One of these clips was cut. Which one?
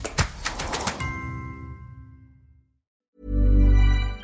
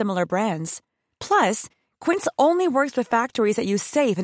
first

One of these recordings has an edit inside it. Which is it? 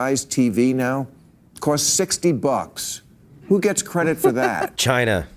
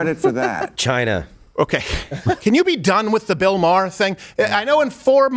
second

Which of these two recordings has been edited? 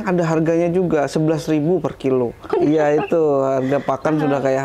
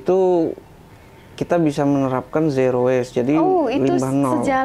first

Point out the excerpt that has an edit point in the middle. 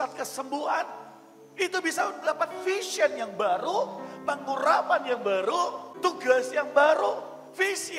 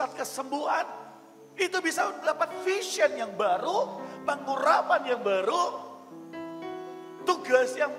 first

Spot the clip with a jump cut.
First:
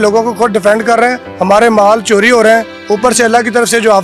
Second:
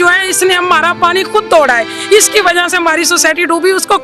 first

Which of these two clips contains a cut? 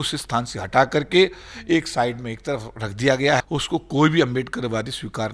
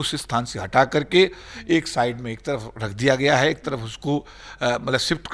first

